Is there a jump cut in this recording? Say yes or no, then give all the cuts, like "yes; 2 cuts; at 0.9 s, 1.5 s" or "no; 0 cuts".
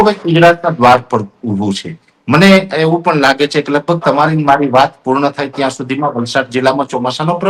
no; 0 cuts